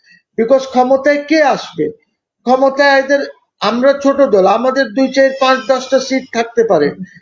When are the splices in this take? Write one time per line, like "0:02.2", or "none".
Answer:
none